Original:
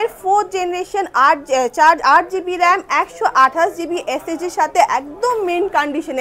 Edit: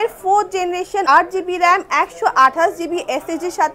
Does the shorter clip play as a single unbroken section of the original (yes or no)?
no